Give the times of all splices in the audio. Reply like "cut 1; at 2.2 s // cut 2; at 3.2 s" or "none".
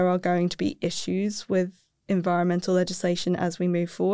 cut 1; at 1.9 s